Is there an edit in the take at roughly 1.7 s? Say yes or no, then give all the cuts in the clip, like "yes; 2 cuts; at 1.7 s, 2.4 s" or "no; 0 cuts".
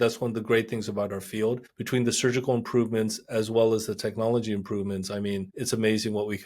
yes; 2 cuts; at 1.7 s, 5.5 s